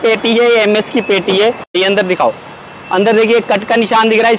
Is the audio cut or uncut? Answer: cut